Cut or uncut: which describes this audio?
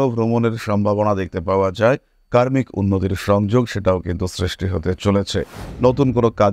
cut